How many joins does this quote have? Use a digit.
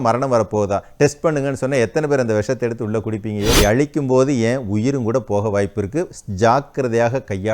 1